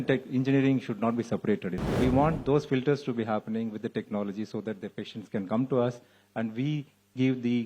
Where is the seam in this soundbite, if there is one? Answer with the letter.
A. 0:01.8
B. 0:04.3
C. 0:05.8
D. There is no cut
A